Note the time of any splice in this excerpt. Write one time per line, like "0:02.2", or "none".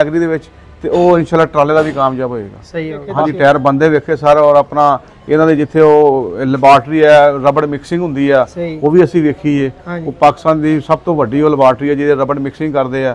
0:03.0